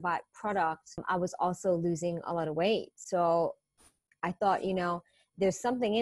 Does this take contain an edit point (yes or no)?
yes